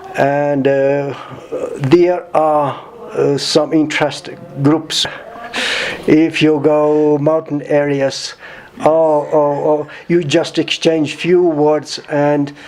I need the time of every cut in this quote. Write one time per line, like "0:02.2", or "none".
0:05.0